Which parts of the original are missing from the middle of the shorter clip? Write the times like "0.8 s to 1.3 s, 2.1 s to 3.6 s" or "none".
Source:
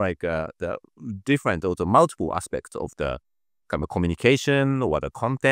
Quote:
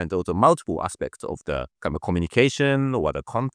3.2 s to 3.6 s